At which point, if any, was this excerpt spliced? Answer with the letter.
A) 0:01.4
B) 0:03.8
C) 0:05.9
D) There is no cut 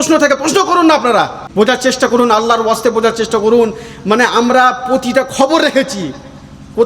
A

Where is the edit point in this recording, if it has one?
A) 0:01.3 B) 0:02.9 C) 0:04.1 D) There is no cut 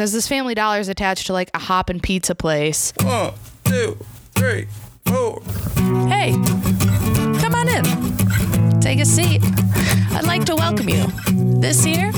B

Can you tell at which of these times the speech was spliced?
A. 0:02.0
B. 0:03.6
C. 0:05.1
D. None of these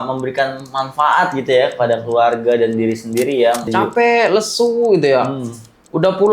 B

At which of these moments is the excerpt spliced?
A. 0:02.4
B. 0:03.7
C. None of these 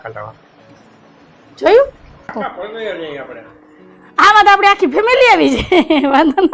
A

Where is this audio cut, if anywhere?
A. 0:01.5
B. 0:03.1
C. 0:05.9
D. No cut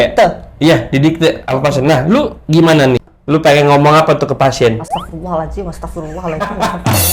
B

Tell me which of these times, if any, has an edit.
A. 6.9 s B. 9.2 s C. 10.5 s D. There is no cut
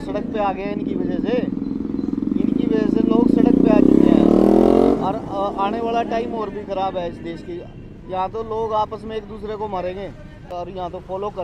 C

